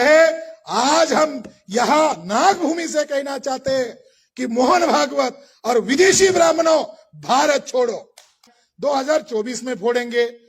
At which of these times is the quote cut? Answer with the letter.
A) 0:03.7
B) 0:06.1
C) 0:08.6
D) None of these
C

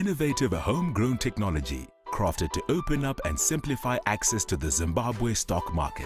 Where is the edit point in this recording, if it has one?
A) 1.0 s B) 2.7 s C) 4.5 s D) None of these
C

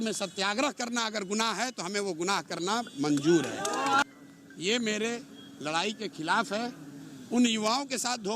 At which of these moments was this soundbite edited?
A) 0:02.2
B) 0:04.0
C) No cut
B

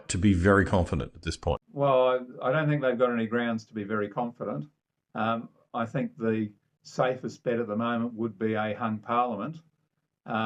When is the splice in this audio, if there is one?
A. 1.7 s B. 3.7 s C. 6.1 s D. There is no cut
A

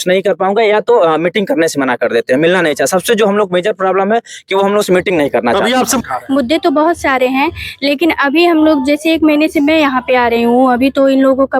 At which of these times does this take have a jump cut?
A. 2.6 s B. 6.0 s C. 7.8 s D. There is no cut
B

